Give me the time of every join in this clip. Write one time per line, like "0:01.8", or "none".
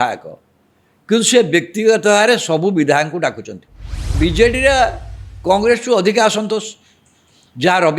0:04.1